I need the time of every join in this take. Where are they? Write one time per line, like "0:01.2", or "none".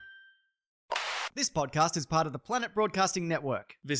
0:00.9